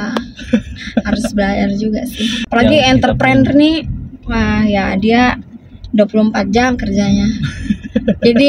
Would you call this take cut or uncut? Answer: cut